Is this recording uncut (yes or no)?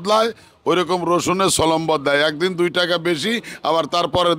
yes